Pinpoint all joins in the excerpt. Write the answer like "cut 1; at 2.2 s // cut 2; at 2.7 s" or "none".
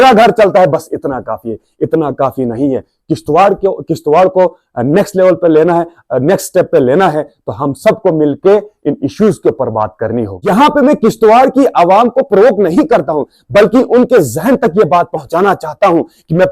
cut 1; at 10.3 s